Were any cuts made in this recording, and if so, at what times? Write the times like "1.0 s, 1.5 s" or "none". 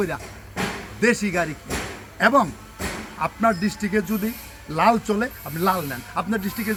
none